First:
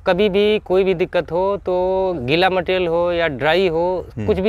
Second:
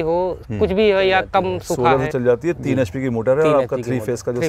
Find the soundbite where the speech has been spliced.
second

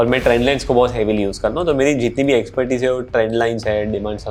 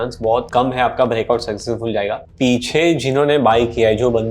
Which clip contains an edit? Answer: second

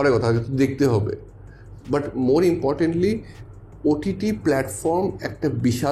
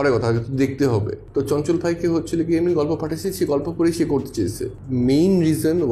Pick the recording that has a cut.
second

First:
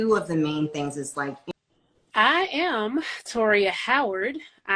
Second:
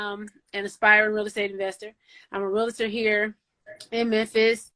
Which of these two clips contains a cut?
first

